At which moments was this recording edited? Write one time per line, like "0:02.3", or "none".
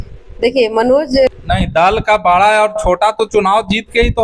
0:01.4